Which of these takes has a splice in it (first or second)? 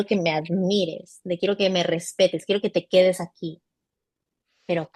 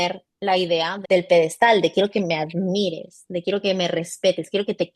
second